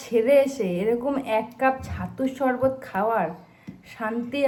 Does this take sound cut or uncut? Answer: uncut